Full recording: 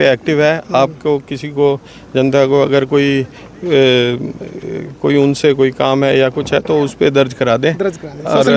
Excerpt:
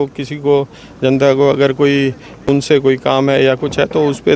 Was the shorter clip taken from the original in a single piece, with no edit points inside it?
no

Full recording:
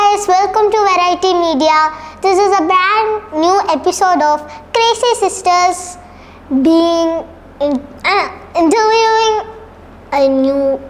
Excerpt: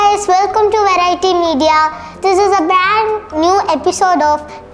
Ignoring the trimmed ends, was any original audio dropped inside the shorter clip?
no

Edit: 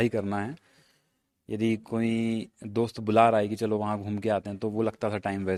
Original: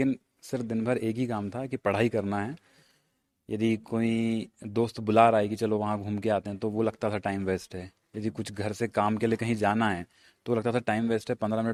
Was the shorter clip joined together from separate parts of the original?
no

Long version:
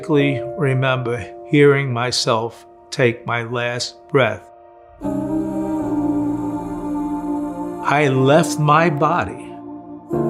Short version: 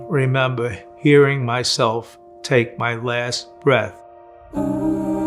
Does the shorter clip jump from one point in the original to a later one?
no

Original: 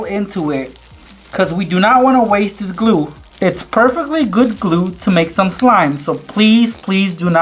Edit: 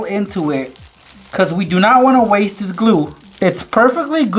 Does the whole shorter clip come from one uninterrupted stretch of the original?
yes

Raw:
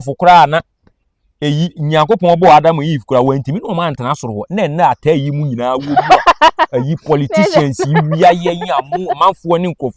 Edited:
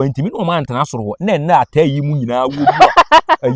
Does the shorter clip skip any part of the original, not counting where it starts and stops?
no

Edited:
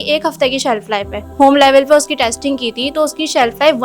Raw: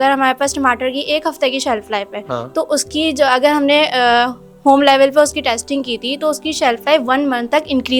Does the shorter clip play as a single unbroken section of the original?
no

